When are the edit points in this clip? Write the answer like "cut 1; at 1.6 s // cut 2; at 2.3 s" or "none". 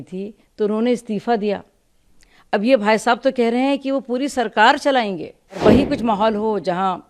cut 1; at 5.6 s